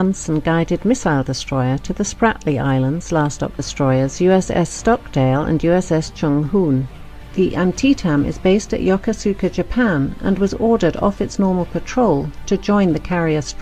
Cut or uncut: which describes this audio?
uncut